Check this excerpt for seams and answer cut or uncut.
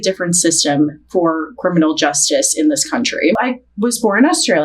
cut